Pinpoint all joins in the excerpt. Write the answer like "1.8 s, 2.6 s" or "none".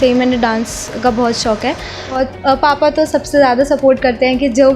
2.2 s